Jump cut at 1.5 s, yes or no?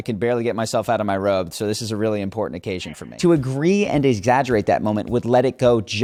no